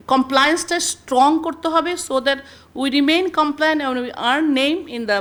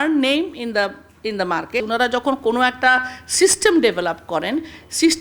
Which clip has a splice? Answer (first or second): second